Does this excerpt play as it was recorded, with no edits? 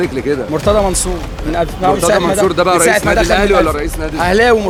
yes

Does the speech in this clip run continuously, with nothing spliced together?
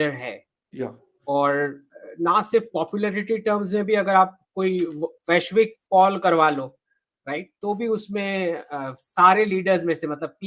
yes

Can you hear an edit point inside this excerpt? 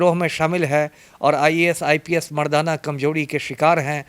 no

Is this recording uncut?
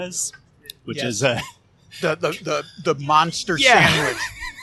yes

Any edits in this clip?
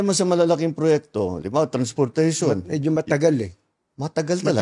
no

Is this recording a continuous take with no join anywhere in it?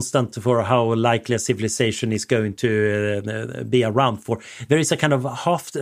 yes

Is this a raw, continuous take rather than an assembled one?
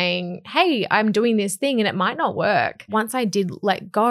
no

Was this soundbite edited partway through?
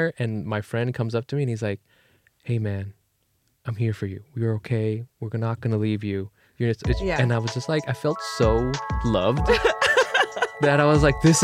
no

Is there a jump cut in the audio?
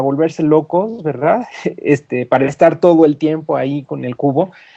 yes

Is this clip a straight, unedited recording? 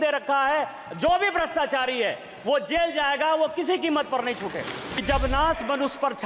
no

